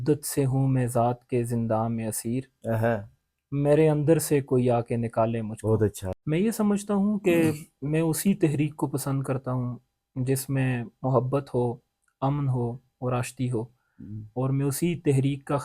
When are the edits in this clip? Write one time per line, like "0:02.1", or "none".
0:06.0

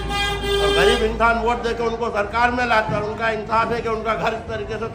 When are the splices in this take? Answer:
none

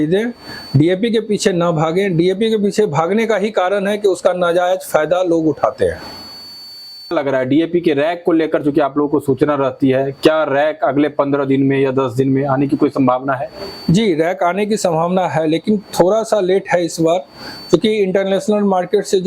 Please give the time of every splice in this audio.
0:07.1

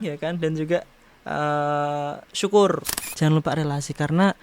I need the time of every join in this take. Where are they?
0:03.0

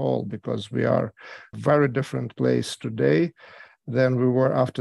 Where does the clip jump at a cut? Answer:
0:01.5

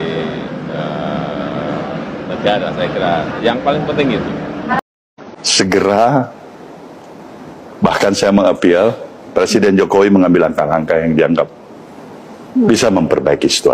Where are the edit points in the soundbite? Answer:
0:05.1

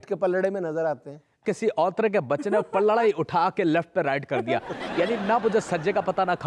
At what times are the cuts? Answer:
0:01.4

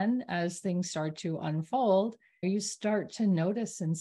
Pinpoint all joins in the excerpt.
0:02.4

